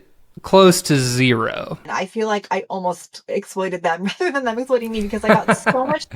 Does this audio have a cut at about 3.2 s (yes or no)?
no